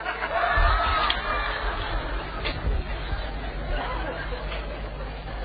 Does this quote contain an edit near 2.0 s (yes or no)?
no